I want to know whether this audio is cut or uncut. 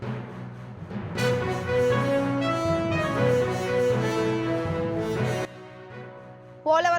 cut